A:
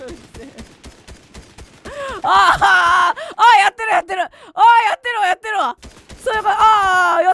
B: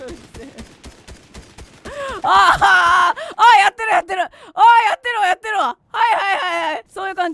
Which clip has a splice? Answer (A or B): A